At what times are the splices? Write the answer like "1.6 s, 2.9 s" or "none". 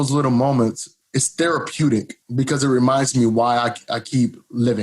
0.9 s, 2.2 s